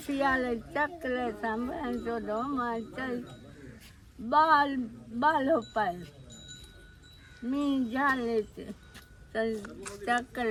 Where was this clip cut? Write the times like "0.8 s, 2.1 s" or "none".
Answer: none